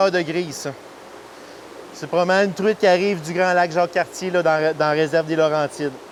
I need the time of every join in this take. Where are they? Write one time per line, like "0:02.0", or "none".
none